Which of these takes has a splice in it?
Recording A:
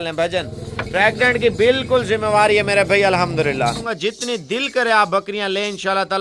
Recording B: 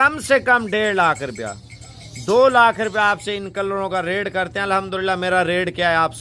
A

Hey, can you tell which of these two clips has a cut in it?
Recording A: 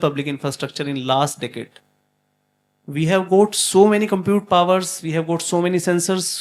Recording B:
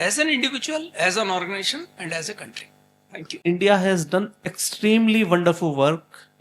B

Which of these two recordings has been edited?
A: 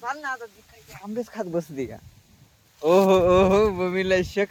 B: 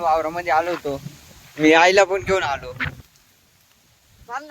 B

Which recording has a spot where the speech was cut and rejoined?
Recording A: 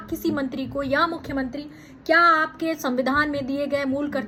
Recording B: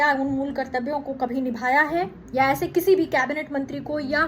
B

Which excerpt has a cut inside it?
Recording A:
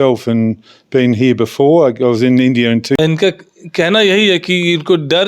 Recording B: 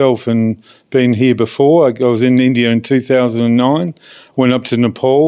A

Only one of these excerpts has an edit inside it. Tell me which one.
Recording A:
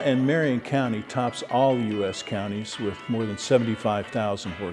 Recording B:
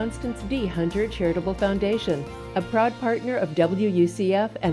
A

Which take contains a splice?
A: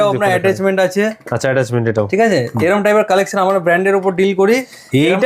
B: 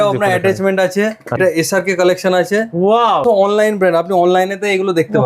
B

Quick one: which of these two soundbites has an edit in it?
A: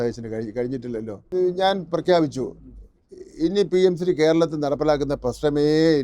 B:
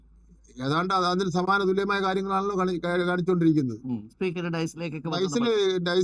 A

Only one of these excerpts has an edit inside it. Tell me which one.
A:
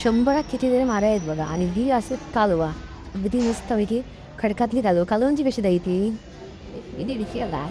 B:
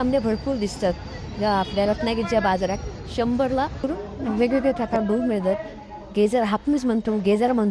B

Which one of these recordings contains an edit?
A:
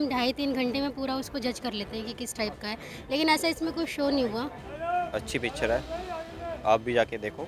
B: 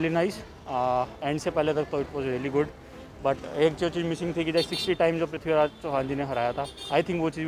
A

